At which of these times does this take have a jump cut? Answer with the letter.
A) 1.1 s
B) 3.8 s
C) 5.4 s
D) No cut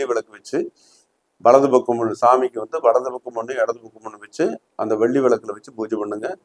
D